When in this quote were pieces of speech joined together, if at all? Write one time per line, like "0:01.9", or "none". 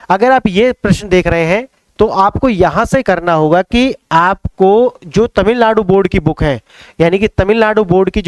none